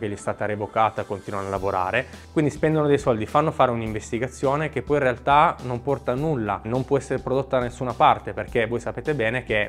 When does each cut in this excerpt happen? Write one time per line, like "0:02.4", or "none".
0:02.1
0:06.6